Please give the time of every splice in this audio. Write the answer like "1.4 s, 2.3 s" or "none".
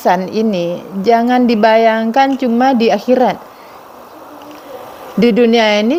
none